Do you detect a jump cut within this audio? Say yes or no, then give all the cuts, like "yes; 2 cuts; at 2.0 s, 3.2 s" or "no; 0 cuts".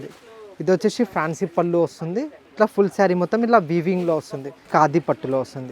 yes; 2 cuts; at 2.4 s, 4.6 s